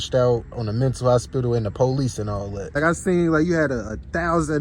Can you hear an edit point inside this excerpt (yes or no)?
yes